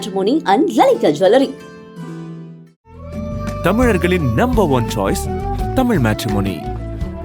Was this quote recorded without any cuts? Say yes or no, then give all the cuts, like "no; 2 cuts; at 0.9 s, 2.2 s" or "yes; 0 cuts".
yes; 0 cuts